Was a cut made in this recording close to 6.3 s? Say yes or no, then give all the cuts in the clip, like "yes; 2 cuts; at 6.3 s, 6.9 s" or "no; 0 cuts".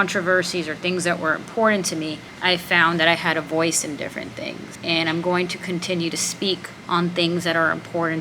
yes; 3 cuts; at 2.2 s, 4.7 s, 6.3 s